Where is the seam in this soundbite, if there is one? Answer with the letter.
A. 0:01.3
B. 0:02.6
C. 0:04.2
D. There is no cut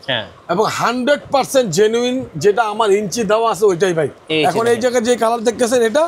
C